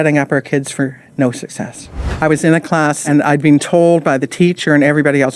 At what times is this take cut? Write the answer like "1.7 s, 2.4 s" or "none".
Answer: 2.1 s, 3.0 s